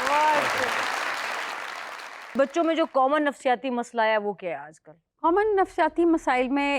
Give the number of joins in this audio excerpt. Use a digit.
1